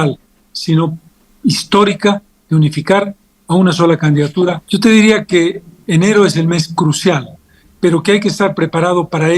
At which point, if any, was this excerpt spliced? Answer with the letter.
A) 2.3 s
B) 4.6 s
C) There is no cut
B